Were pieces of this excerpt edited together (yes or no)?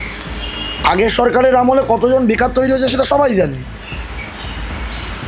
no